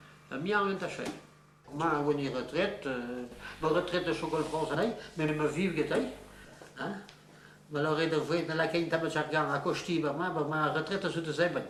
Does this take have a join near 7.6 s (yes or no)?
no